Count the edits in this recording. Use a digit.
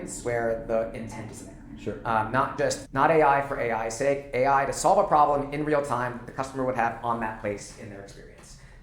1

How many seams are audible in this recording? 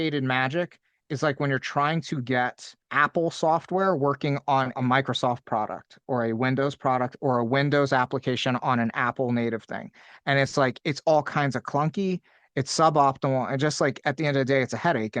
2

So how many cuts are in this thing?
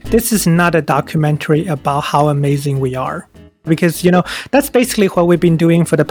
1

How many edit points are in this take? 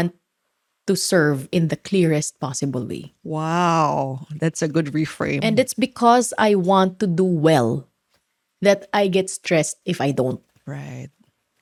0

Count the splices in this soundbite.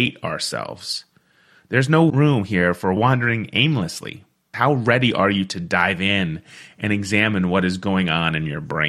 1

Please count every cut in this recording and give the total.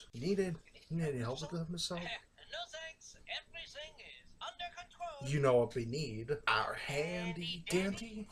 1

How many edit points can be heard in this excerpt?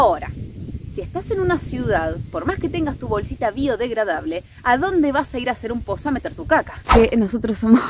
1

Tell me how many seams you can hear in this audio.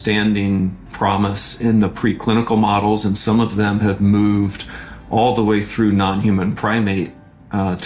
1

